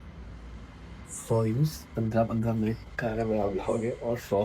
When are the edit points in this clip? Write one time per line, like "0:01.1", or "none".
none